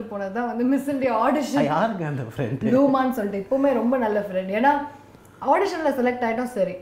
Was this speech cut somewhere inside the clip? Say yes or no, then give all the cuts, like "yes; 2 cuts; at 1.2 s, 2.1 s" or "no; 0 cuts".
no; 0 cuts